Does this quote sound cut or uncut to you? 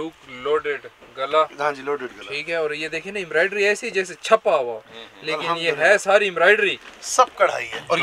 uncut